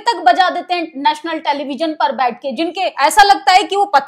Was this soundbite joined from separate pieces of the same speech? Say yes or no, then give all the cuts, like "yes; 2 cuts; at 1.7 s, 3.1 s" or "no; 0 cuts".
yes; 1 cut; at 2.9 s